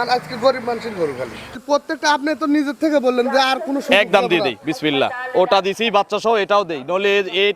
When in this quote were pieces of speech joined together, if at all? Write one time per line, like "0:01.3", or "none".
0:01.6